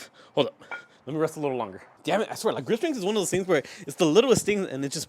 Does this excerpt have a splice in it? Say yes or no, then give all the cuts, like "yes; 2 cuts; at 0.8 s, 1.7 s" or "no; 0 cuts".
yes; 1 cut; at 1.9 s